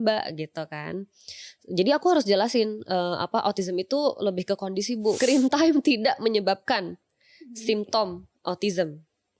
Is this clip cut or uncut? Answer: cut